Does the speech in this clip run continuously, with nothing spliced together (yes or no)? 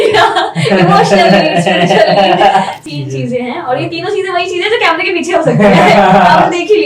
no